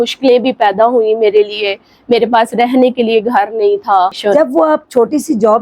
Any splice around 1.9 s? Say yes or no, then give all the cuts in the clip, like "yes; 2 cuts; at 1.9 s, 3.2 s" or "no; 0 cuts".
no; 1 cut; at 4.2 s